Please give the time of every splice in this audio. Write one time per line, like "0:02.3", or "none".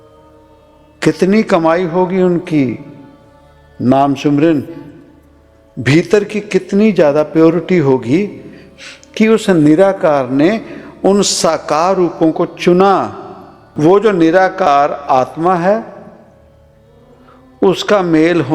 0:13.6

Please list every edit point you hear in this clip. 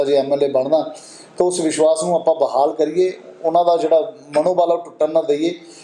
none

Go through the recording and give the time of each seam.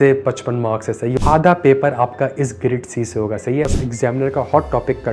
0:01.1
0:03.8

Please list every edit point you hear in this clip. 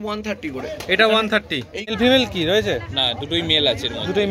0:01.9

